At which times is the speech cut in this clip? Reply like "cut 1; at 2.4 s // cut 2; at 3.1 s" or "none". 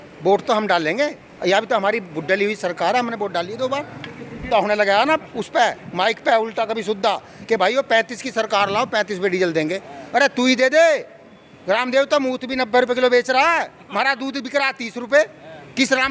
cut 1; at 4.4 s